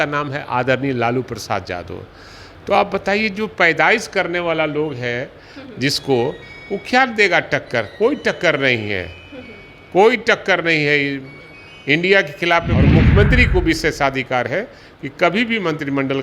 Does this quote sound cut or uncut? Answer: cut